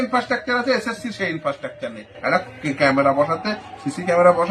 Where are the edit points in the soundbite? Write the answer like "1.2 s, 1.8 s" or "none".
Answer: none